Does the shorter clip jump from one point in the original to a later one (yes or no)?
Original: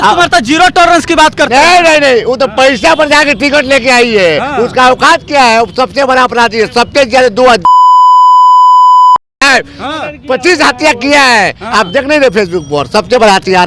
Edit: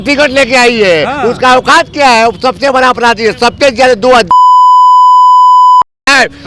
no